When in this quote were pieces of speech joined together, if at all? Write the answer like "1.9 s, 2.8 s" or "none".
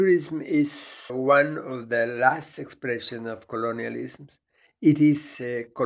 1.1 s